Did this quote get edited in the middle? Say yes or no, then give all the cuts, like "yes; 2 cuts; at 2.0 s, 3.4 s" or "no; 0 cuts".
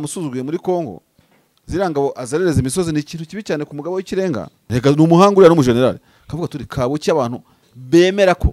yes; 1 cut; at 4.6 s